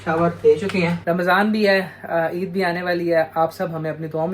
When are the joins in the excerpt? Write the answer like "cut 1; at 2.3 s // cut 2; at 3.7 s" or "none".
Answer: cut 1; at 1.0 s